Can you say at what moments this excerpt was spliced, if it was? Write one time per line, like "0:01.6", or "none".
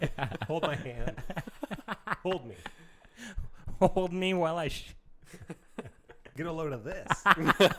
0:06.3